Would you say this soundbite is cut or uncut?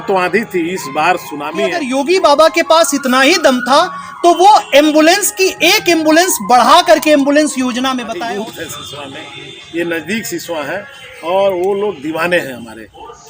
cut